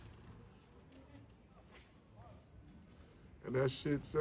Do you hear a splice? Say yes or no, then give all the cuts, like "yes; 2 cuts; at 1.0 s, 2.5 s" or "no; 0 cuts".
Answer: no; 0 cuts